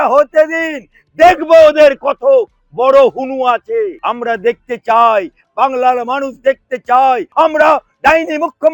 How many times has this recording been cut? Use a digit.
2